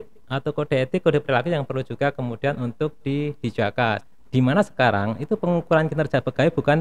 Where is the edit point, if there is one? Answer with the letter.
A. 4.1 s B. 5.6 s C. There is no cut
A